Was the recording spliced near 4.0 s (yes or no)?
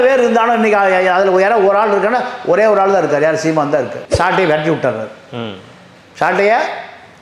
yes